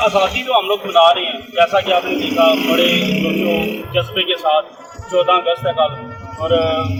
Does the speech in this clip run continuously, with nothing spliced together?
yes; 0 cuts

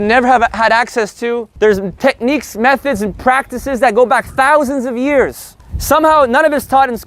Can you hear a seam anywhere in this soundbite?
yes; 1 cut; at 1.5 s

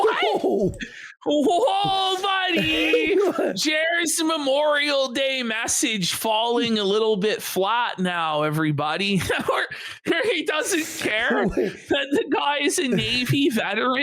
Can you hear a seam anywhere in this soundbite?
no; 0 cuts

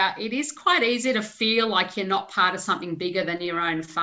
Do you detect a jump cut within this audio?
no; 0 cuts

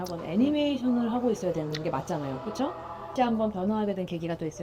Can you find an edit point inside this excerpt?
yes; 1 cut; at 3.1 s

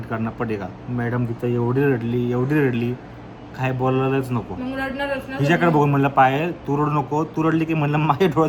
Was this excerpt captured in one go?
yes; 0 cuts

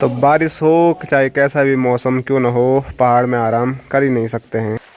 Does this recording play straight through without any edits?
yes; 0 cuts

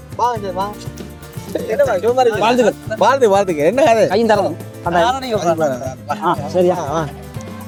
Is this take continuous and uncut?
yes; 0 cuts

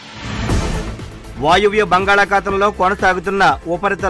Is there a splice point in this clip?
yes; 1 cut; at 0.9 s

